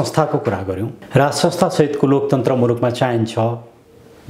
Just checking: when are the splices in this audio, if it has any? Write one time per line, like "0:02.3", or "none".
0:00.9